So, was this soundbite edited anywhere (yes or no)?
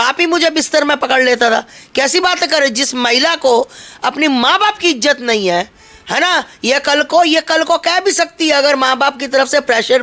no